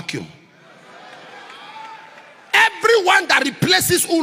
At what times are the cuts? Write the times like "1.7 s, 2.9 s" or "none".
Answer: none